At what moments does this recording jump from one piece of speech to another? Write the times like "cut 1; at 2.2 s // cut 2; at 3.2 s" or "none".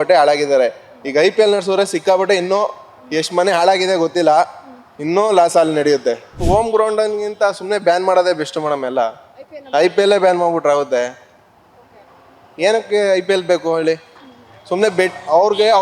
cut 1; at 6.4 s